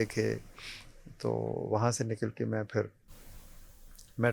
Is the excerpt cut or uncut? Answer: uncut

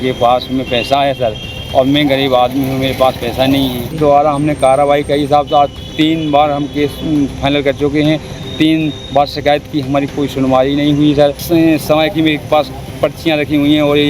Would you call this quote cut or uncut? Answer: cut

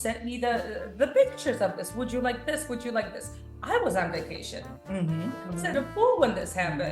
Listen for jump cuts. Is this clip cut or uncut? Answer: uncut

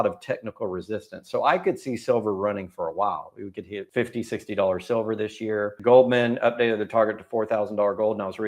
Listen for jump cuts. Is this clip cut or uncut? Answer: cut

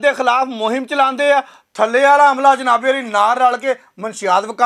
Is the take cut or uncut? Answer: uncut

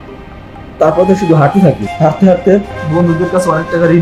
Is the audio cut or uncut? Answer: cut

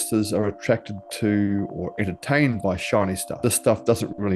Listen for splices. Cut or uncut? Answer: cut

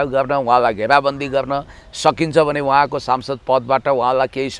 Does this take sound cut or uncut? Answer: uncut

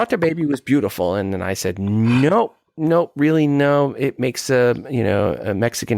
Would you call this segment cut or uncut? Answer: uncut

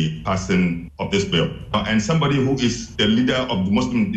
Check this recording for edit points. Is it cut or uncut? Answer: cut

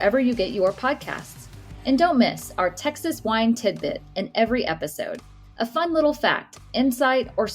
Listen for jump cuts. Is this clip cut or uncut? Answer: uncut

